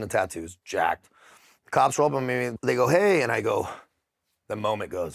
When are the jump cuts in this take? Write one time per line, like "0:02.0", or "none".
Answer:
none